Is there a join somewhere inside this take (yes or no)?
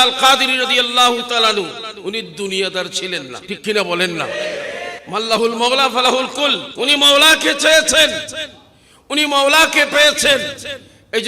yes